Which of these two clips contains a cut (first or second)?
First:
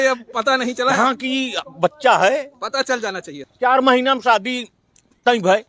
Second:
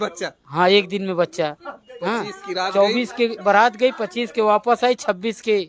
first